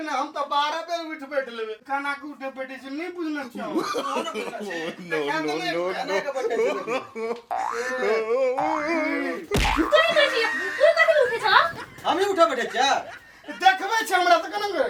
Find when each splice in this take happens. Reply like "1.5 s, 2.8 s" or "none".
none